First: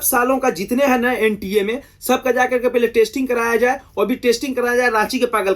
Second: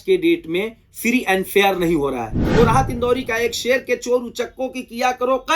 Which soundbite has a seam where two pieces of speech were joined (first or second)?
second